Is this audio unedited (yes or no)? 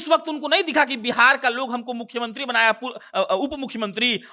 yes